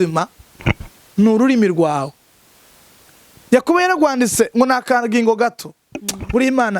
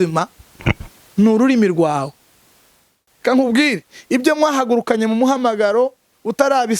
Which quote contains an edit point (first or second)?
second